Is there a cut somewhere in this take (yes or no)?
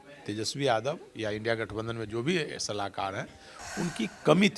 no